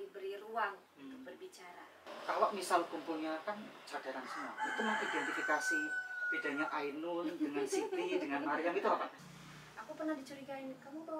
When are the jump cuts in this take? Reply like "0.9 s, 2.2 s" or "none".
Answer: 2.0 s, 9.2 s